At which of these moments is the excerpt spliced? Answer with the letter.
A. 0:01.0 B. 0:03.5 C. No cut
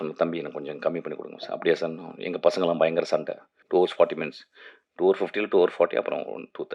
B